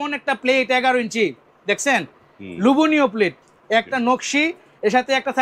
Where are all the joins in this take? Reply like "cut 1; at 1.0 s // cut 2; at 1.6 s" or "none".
none